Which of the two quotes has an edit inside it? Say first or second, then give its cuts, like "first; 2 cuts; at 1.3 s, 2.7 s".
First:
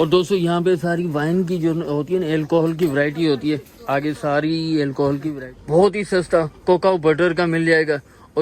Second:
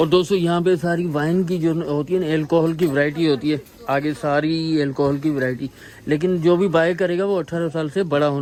first; 1 cut; at 5.4 s